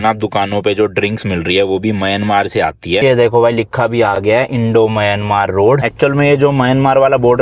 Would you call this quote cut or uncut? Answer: cut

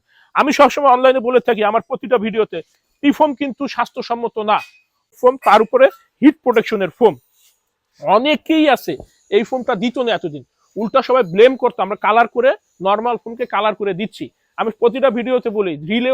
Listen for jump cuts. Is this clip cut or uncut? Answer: cut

